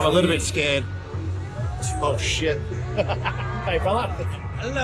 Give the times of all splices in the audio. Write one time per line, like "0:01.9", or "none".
none